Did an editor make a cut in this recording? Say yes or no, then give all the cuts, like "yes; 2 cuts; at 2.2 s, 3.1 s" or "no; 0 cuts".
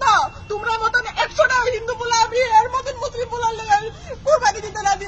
no; 0 cuts